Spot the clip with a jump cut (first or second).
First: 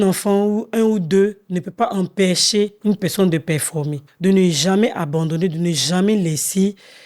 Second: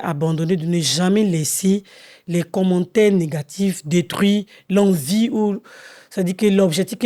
first